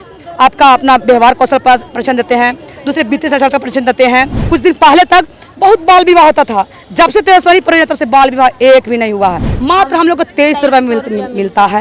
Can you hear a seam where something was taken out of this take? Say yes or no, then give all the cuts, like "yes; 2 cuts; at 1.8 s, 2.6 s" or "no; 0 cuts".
yes; 2 cuts; at 4.4 s, 9.5 s